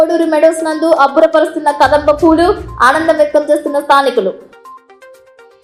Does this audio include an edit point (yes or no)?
no